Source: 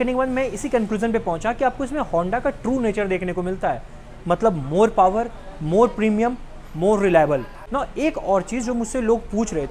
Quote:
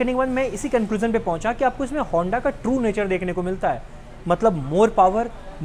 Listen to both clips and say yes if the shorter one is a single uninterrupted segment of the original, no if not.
yes